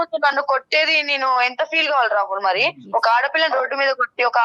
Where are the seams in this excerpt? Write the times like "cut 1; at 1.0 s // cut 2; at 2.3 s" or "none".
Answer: none